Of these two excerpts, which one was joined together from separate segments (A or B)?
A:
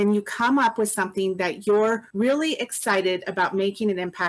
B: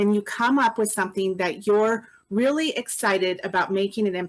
A